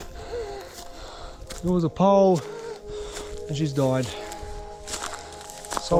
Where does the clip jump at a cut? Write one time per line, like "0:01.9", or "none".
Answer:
none